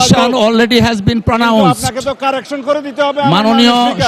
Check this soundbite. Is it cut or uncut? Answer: uncut